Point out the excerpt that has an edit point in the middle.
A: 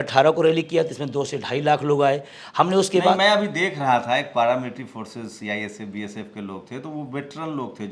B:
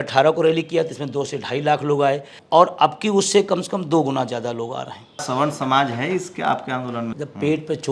B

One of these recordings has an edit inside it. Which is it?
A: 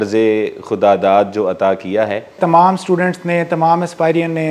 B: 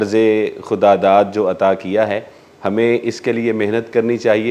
A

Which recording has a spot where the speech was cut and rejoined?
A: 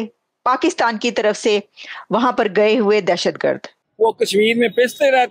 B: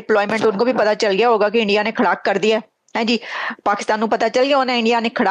A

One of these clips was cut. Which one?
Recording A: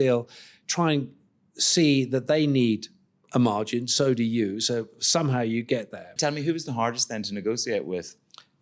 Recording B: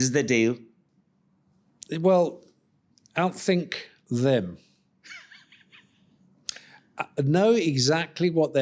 A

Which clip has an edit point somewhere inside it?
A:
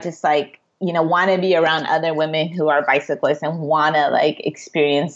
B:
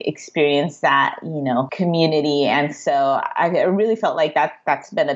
B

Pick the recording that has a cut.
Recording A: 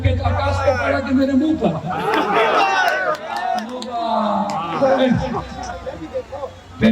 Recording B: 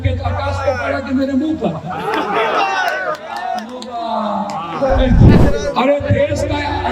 B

